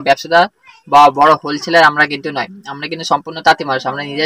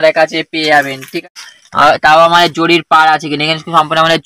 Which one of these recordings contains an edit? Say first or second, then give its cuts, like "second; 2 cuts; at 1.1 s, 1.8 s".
second; 1 cut; at 1.2 s